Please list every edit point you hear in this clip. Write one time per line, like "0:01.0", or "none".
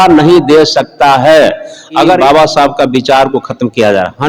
0:02.2